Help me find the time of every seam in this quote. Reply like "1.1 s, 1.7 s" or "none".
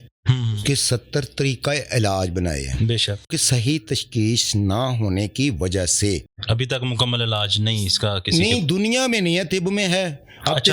3.3 s